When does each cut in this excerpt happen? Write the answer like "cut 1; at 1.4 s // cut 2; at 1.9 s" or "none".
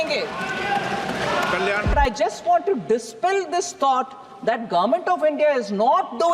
cut 1; at 1.9 s